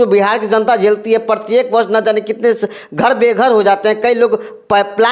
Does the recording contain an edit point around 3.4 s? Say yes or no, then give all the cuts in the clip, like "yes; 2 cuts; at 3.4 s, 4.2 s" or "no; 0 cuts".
no; 0 cuts